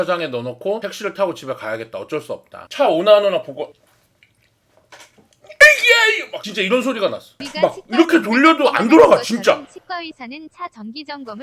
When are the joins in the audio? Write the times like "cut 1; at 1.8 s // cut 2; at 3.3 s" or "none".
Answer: cut 1; at 2.6 s // cut 2; at 7.4 s